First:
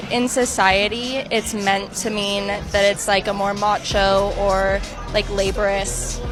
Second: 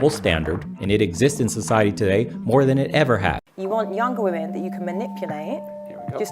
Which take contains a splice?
second; 1 cut; at 3.5 s

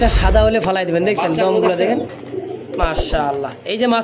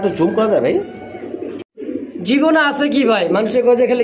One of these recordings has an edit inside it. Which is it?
second; 1 cut; at 1.7 s

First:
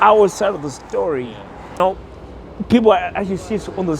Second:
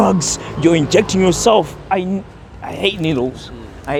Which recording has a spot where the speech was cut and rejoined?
first; 1 cut; at 1.8 s

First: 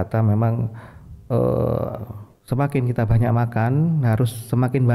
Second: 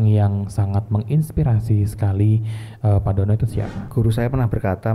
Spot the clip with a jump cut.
second; 1 cut; at 3.8 s

